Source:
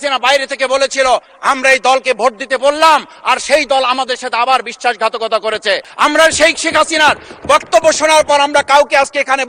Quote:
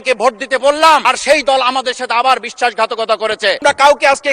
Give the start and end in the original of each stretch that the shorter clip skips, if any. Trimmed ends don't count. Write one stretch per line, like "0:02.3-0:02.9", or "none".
0:03.0-0:03.2
0:05.8-0:08.5